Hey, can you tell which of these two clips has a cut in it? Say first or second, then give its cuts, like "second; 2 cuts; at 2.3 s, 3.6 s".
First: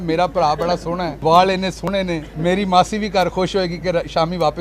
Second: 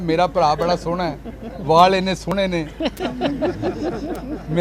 first; 2 cuts; at 1.1 s, 2.3 s